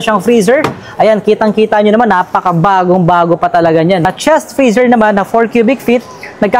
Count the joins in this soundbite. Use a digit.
1